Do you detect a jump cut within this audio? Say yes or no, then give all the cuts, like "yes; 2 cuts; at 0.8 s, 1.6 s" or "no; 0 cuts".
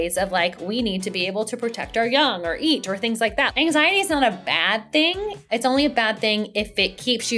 yes; 2 cuts; at 3.5 s, 5.4 s